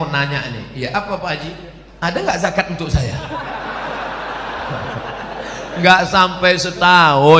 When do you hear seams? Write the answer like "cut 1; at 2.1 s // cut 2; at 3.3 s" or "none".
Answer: none